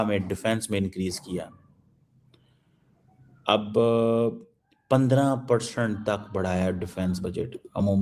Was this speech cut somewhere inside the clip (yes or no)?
no